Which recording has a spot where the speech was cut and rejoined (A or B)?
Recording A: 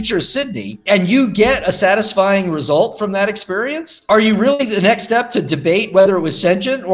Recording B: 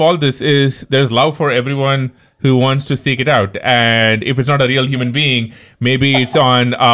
A